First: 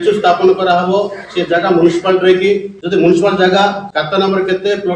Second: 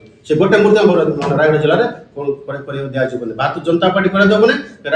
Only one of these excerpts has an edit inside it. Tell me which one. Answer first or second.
first